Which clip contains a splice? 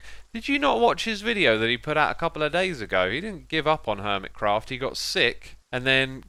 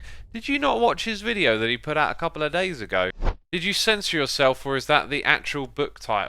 second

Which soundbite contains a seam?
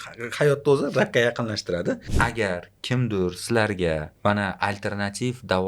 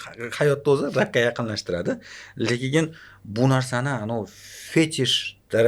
first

